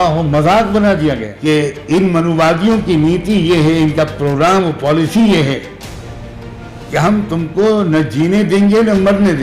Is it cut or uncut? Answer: cut